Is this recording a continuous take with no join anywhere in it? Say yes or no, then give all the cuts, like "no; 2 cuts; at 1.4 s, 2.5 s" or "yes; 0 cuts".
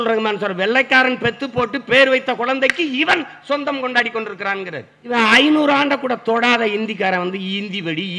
no; 1 cut; at 5.1 s